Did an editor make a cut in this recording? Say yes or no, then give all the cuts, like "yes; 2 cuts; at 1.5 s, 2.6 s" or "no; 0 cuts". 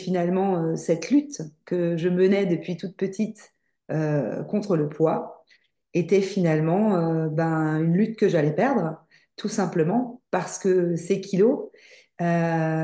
no; 0 cuts